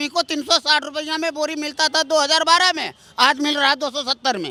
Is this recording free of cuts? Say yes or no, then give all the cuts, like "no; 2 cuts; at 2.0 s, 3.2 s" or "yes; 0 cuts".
yes; 0 cuts